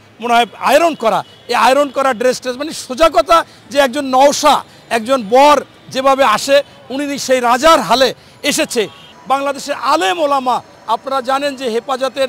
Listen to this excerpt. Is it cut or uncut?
cut